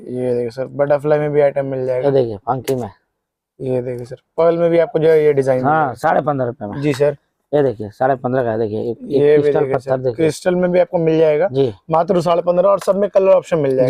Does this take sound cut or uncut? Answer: uncut